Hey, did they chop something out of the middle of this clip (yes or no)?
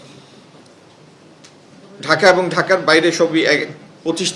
no